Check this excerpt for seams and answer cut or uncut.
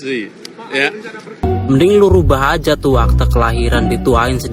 cut